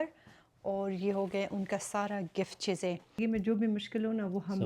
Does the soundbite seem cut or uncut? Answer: cut